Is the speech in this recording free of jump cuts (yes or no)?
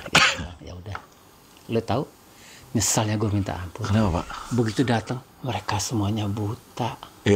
yes